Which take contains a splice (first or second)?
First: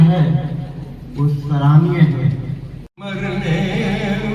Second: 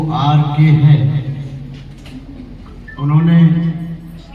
first